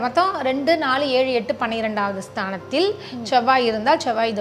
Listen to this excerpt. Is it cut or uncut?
uncut